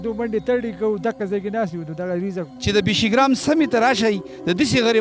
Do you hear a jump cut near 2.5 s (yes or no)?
yes